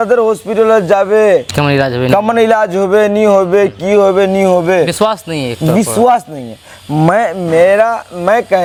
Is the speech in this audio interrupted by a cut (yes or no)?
no